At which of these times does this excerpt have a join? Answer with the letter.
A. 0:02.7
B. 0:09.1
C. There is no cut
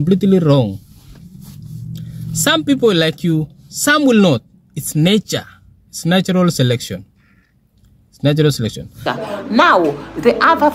B